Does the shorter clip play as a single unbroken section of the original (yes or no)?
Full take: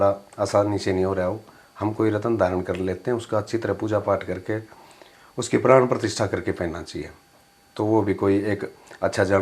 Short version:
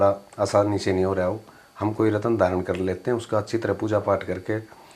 yes